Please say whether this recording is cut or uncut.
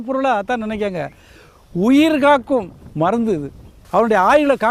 cut